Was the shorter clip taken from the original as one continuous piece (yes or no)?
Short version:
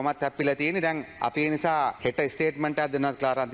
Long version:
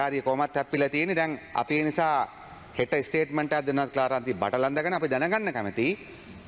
no